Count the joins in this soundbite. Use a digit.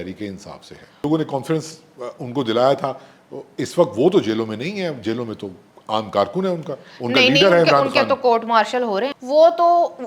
2